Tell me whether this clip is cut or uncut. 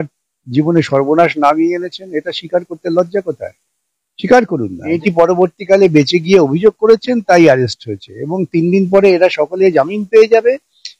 cut